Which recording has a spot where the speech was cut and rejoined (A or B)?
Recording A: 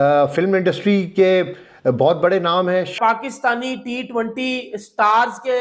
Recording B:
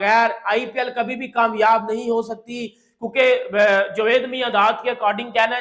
A